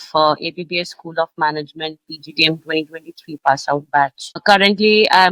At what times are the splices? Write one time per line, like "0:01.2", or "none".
none